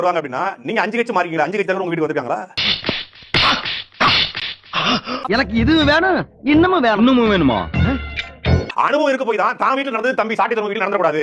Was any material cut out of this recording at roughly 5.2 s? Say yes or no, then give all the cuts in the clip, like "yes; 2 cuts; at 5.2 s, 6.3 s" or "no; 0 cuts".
yes; 1 cut; at 5.2 s